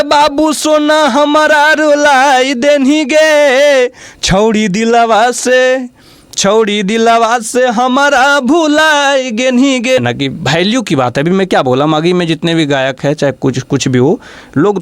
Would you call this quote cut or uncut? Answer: cut